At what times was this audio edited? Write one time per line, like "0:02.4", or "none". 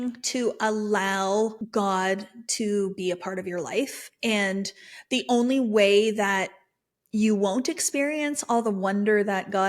0:01.6